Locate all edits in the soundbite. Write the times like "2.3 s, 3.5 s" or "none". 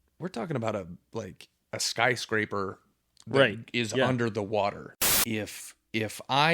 4.9 s